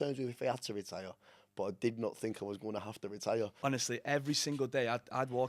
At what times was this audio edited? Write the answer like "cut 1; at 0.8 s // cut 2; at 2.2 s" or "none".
cut 1; at 3.5 s